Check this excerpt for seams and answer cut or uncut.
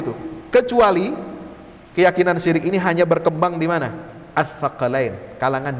uncut